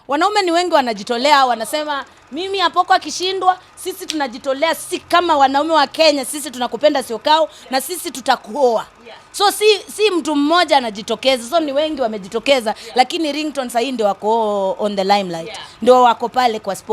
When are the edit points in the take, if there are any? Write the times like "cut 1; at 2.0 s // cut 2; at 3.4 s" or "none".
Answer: none